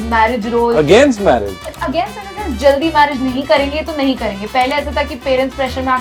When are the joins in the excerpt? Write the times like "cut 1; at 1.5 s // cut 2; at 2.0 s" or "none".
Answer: none